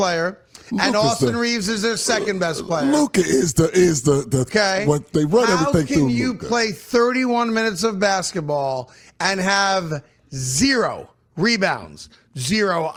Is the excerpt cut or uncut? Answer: uncut